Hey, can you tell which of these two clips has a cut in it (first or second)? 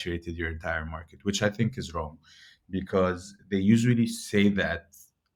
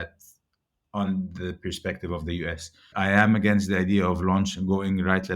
second